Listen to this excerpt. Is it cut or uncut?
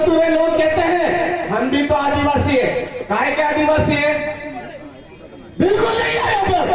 uncut